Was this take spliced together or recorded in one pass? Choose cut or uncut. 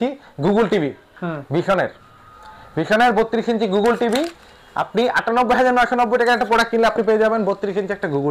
uncut